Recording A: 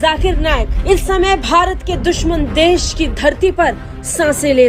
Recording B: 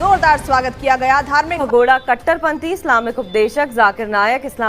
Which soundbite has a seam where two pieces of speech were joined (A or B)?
B